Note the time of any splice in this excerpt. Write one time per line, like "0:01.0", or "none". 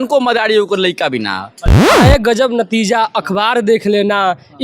0:01.8